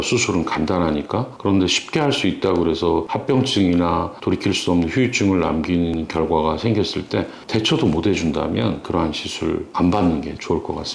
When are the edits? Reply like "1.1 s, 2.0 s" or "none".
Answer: none